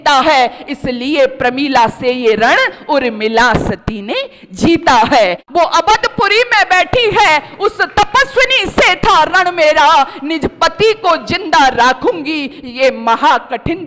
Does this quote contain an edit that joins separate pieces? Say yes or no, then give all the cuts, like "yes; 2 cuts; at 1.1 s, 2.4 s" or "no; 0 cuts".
yes; 1 cut; at 5.4 s